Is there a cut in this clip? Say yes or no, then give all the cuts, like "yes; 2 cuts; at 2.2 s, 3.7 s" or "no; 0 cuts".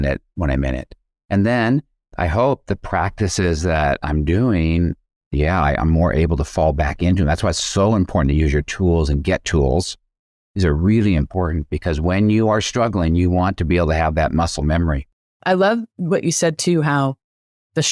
yes; 1 cut; at 15.2 s